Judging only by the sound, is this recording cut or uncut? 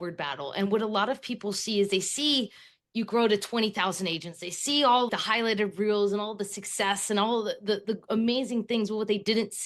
cut